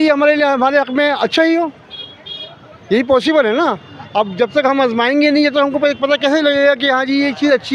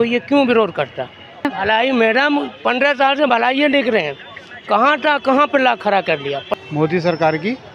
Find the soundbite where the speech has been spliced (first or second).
second